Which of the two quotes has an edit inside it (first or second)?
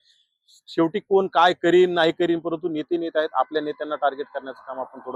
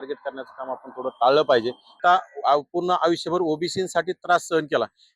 second